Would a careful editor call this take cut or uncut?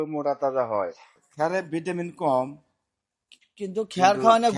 cut